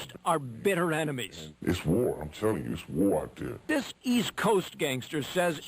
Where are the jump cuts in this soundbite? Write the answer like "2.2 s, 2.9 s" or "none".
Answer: 3.6 s